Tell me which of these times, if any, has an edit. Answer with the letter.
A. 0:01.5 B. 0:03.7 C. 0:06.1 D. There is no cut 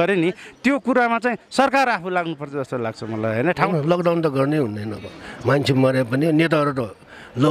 B